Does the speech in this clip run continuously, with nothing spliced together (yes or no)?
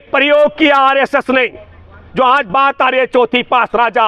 yes